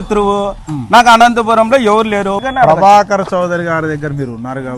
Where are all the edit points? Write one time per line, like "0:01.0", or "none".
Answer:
0:02.4